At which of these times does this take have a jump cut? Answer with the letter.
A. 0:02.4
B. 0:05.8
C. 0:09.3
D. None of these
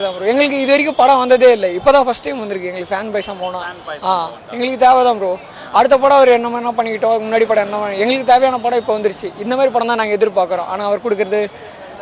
D